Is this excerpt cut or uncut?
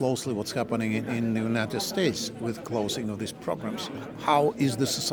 uncut